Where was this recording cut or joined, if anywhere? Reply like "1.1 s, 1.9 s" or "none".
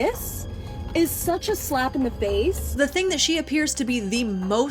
2.7 s